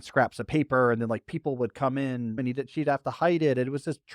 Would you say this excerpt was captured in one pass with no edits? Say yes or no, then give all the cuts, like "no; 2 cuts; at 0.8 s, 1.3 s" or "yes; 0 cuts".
no; 1 cut; at 2.4 s